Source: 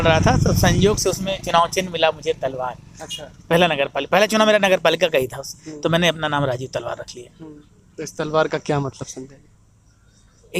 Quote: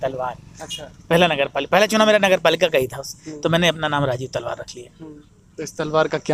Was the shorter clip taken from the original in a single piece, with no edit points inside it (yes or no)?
yes